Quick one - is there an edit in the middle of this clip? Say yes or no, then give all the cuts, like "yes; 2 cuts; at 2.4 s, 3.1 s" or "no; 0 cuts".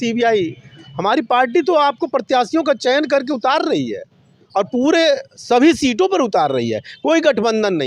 no; 0 cuts